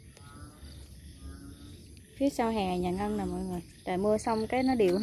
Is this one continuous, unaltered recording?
no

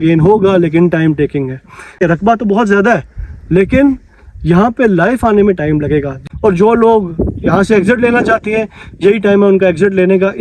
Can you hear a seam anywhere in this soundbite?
yes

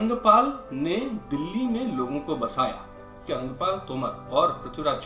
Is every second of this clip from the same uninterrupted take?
no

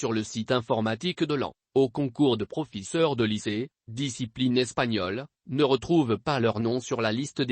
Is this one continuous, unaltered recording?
no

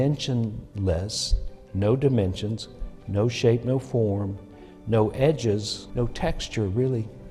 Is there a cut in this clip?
yes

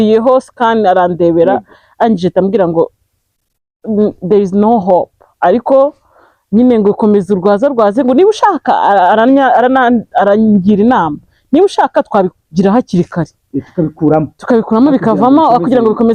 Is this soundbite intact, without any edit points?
yes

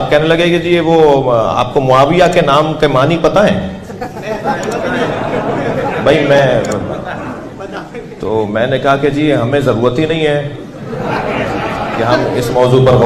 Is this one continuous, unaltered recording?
yes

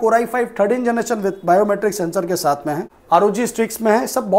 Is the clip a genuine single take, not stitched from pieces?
no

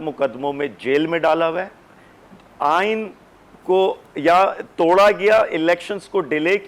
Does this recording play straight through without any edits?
yes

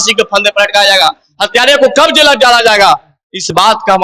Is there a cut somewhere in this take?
no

